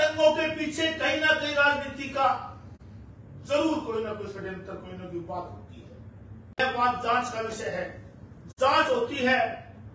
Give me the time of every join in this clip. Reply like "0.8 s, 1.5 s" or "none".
6.6 s